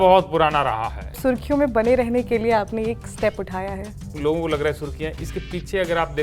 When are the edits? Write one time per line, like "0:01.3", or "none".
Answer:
0:01.2
0:04.2